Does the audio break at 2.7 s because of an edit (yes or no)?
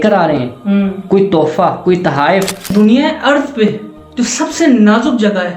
yes